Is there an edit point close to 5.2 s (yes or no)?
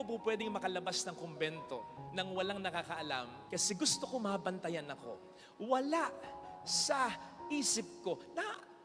no